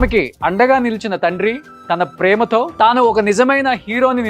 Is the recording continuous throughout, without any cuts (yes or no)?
no